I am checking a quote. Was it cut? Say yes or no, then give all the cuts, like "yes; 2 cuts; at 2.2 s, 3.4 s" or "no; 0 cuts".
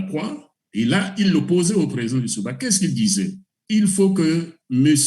yes; 1 cut; at 3.5 s